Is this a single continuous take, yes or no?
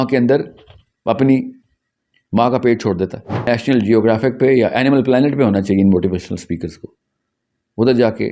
no